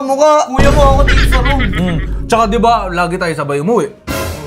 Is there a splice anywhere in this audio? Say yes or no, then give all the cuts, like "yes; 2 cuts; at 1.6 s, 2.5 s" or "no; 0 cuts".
no; 0 cuts